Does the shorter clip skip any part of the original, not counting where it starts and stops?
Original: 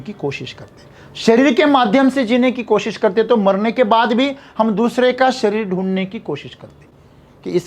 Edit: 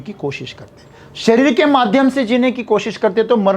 no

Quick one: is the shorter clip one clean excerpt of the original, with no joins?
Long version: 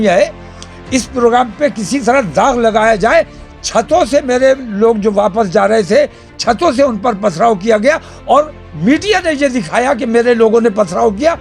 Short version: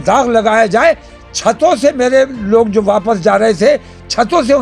yes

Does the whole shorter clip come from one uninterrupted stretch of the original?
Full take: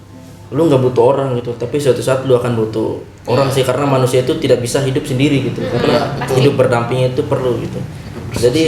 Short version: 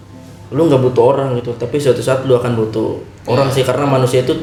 yes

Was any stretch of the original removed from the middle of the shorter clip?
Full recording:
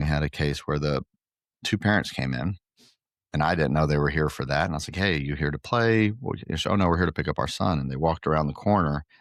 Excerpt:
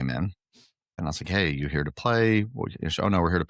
yes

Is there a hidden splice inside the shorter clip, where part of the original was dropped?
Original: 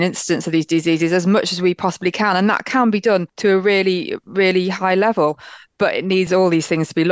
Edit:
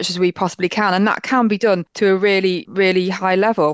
yes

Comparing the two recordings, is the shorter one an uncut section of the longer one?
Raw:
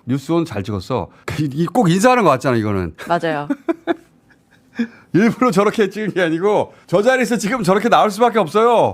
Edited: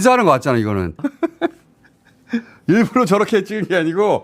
no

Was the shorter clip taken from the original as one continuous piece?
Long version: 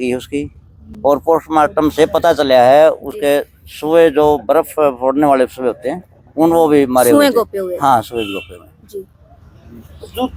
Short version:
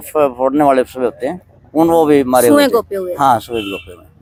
yes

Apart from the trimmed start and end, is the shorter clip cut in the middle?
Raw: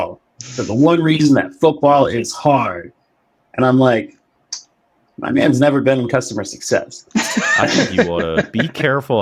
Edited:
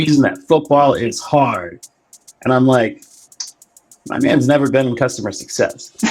no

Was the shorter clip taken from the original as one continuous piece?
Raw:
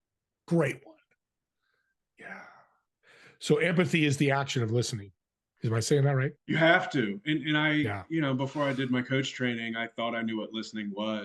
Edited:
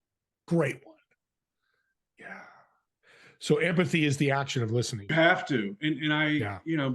no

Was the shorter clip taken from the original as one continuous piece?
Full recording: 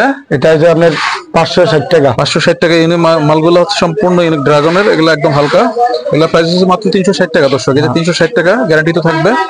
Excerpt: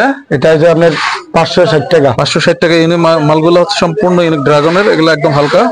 yes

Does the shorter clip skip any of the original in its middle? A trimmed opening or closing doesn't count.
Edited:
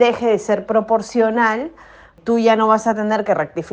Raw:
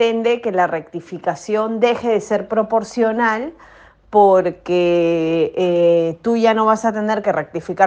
yes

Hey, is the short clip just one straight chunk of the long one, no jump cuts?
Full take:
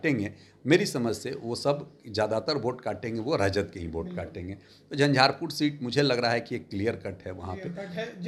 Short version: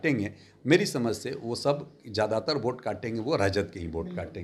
yes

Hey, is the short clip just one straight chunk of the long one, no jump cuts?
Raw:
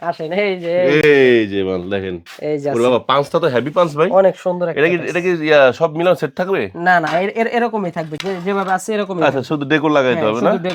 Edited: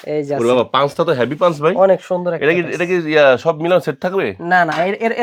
yes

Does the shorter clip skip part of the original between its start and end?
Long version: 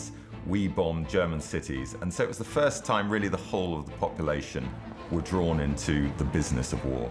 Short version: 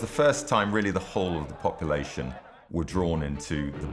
no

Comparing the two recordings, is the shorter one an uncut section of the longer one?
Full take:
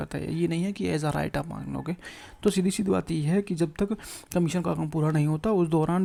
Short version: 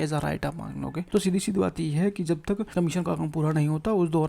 no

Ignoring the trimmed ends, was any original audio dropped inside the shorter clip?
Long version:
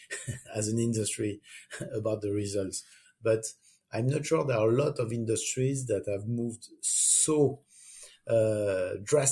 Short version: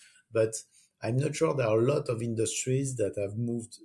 no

